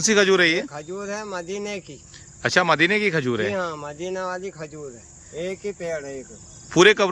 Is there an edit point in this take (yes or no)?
no